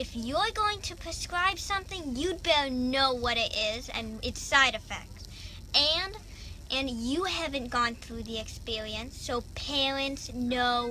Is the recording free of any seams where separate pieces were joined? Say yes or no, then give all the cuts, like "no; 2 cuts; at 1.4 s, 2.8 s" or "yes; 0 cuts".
yes; 0 cuts